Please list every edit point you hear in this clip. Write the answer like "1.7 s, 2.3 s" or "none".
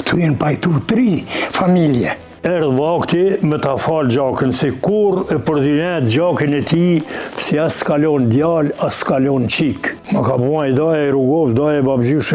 2.3 s, 9.9 s